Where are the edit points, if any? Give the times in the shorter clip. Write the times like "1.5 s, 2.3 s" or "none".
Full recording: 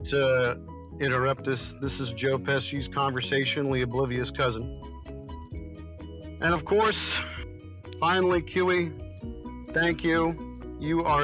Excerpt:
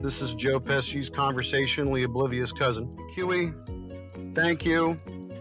3.1 s